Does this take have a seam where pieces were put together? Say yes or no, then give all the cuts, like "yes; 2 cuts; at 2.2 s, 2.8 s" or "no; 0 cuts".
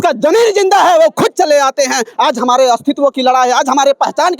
no; 0 cuts